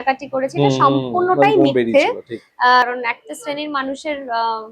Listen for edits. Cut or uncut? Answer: cut